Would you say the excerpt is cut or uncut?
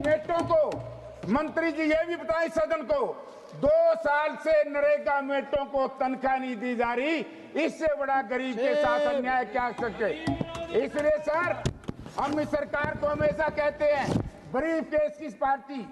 uncut